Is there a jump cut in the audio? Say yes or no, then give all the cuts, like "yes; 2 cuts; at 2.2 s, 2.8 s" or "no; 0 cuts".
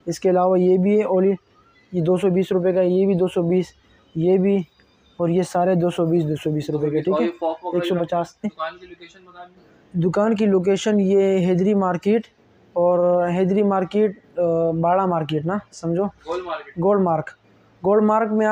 yes; 1 cut; at 8.5 s